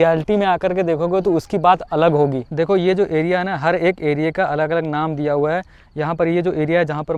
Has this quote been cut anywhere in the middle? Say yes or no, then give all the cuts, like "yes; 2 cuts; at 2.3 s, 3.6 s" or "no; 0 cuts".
no; 0 cuts